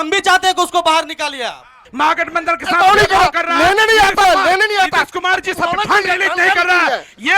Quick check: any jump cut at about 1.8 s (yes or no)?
yes